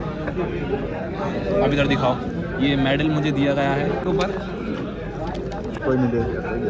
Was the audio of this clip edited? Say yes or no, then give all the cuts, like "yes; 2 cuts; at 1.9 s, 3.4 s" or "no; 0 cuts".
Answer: yes; 2 cuts; at 4.0 s, 5.8 s